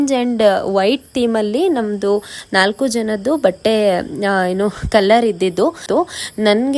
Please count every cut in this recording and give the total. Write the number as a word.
one